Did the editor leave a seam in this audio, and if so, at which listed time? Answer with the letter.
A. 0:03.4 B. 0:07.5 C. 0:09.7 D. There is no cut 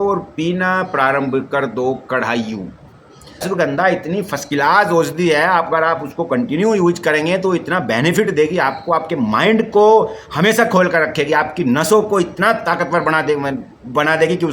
A